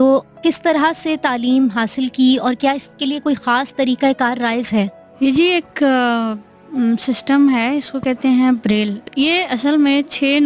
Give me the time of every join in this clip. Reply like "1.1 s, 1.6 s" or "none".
5.0 s, 9.0 s